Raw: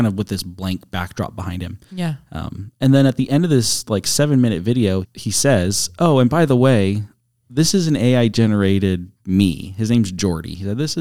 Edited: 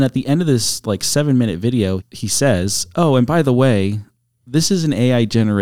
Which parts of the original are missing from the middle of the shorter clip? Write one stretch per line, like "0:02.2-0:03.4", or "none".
none